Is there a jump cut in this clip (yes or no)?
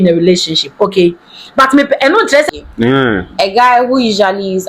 yes